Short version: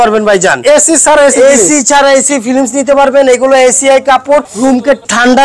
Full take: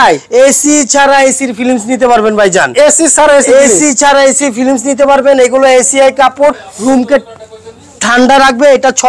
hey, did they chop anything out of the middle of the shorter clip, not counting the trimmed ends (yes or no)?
yes